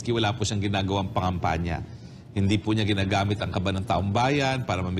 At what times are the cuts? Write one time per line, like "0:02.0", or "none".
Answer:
none